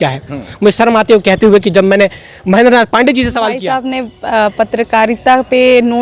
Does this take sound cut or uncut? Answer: cut